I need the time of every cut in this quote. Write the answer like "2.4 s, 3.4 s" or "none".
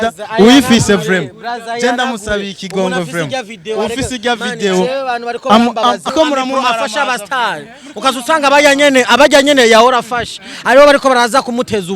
6.1 s

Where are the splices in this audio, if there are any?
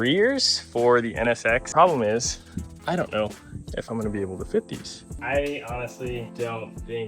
1.7 s, 5.1 s

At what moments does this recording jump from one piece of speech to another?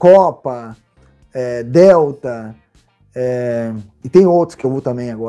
3.9 s

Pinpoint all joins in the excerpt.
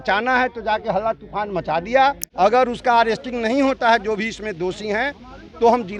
2.5 s

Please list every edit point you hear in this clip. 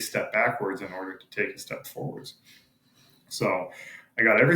none

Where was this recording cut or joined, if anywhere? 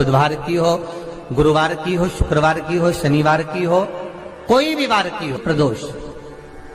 5.4 s

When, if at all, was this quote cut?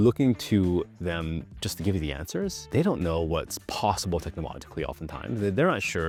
none

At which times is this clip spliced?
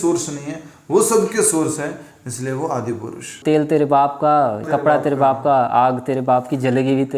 3.4 s, 4.6 s

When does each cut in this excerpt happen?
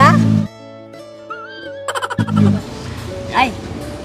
2.5 s

